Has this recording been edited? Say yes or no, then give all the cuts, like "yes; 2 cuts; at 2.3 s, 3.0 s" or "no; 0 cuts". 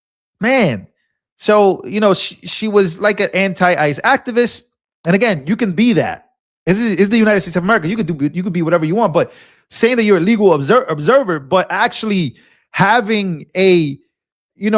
no; 0 cuts